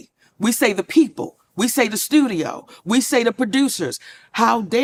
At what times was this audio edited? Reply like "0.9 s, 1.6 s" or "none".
none